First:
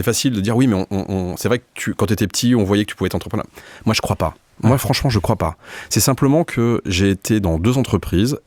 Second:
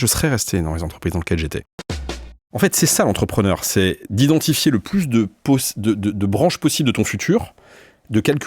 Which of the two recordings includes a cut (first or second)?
second